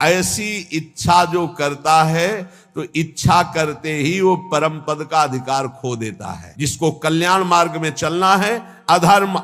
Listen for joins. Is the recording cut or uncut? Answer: cut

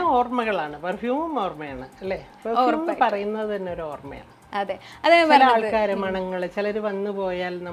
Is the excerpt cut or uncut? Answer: uncut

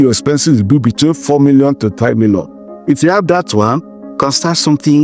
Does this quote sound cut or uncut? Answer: uncut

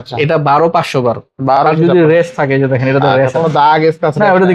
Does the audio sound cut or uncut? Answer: cut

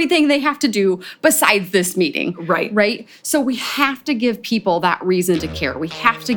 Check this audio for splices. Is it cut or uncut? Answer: uncut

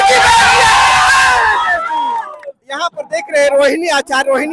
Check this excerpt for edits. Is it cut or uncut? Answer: uncut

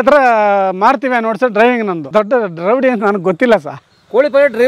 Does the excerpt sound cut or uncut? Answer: cut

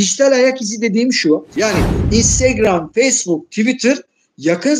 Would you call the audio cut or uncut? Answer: cut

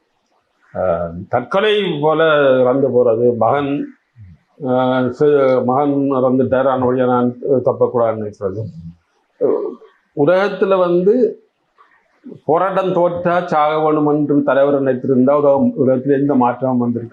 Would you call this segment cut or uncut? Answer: uncut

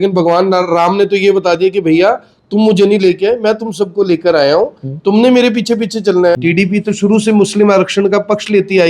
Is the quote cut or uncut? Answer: cut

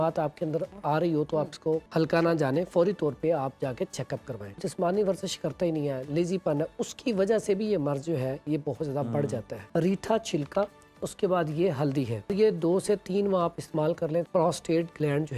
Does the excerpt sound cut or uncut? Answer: cut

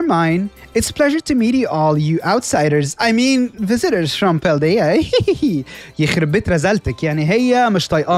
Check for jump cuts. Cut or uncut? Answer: uncut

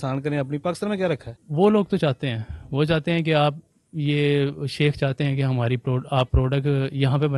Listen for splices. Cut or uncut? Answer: cut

